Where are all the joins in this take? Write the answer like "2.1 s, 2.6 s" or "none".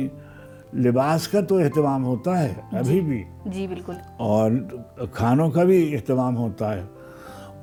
none